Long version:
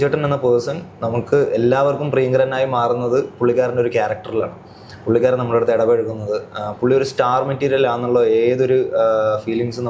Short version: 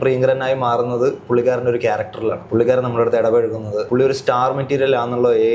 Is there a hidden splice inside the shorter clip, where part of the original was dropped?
yes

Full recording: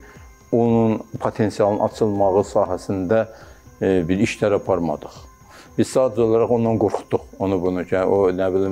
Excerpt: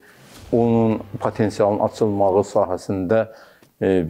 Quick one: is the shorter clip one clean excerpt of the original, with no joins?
yes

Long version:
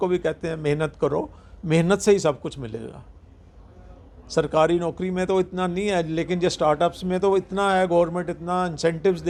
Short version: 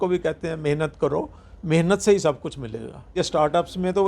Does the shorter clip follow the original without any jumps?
no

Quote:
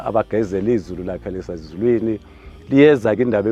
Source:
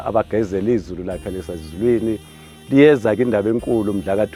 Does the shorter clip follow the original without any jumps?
yes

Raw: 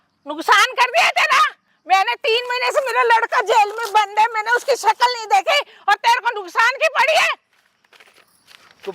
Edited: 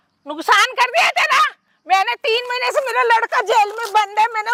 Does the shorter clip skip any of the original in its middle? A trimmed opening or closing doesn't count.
no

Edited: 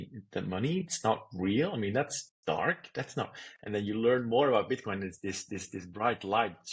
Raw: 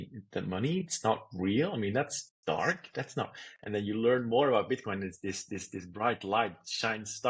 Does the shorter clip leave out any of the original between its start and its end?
no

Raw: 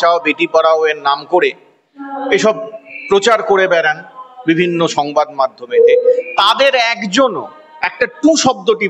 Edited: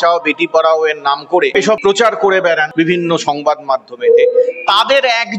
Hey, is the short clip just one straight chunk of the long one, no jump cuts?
no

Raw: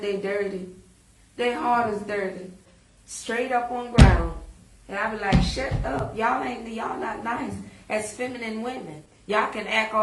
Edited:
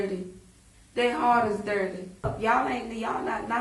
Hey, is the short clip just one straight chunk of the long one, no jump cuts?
no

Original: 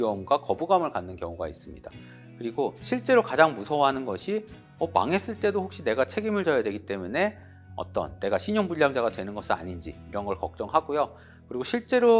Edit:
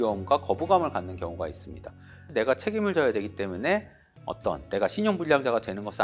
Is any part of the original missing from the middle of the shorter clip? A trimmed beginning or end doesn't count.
yes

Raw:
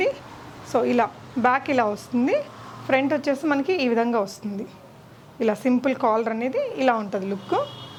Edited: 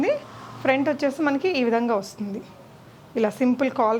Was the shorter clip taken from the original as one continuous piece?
yes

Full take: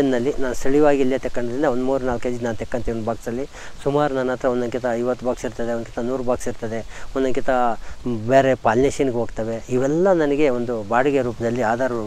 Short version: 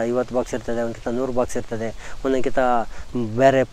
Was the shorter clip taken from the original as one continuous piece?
yes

